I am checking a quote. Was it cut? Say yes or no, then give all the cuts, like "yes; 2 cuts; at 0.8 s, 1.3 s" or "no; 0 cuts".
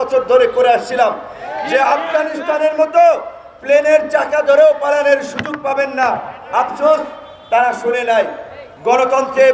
no; 0 cuts